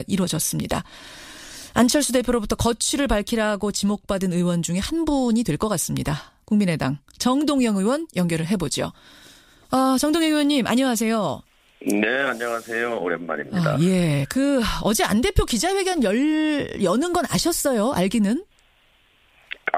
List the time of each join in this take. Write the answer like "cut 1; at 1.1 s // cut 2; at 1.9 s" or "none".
cut 1; at 10.6 s